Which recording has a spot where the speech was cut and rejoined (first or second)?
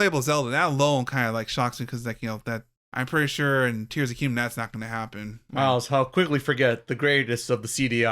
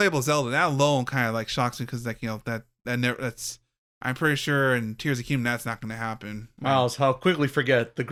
first